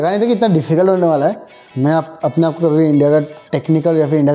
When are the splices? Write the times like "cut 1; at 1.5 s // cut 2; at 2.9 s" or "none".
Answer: cut 1; at 1.6 s